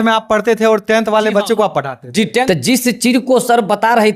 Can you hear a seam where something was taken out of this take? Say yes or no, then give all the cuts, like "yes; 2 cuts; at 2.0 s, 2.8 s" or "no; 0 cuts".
yes; 1 cut; at 2.4 s